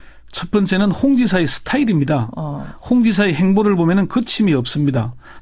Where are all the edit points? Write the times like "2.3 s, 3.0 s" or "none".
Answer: none